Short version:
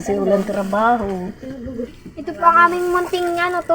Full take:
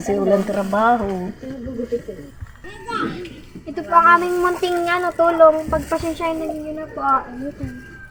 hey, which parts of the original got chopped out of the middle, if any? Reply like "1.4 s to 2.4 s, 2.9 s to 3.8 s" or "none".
1.8 s to 3.3 s